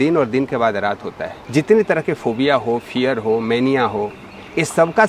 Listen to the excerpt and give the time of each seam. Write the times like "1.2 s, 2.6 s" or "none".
1.4 s